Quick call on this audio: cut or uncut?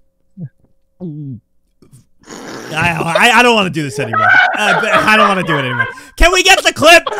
uncut